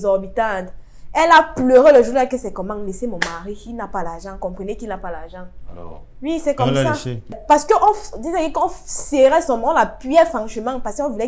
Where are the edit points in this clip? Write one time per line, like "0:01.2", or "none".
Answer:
0:07.4